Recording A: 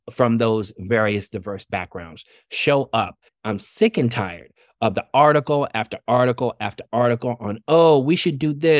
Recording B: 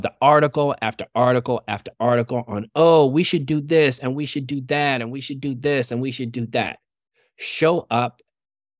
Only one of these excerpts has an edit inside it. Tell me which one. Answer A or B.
A